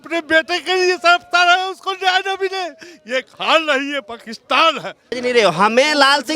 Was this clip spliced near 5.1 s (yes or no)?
yes